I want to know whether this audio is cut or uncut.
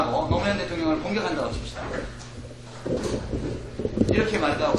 uncut